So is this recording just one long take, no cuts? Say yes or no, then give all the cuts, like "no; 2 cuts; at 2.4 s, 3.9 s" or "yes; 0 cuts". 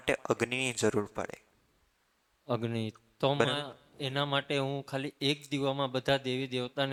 yes; 0 cuts